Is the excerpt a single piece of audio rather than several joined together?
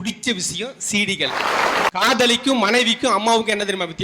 no; 1 cut; at 1.9 s

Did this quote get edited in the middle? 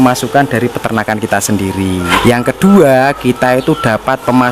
yes; 1 cut; at 2.1 s

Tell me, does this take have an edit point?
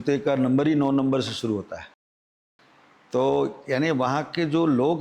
no; 0 cuts

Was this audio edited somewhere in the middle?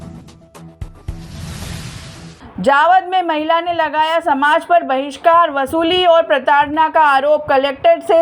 yes; 2 cuts; at 1.4 s, 2.3 s

